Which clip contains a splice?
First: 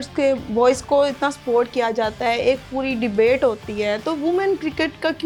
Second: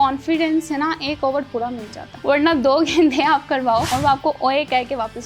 second; 2 cuts; at 2.1 s, 3.9 s

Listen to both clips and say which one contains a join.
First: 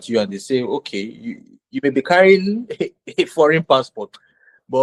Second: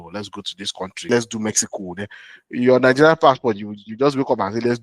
second; 1 cut; at 1.1 s

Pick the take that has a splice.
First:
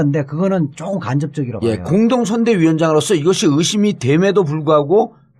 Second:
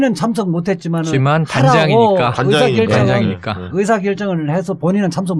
first; 1 cut; at 2.8 s

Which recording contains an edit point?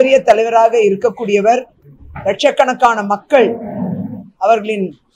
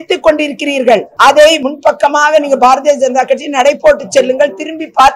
second; 2 cuts; at 1.1 s, 1.6 s

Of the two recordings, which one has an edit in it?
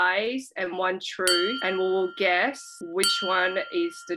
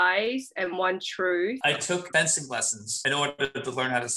second; 1 cut; at 1.6 s

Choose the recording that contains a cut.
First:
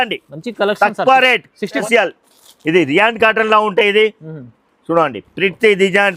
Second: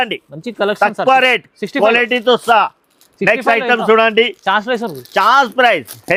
first; 1 cut; at 1.8 s

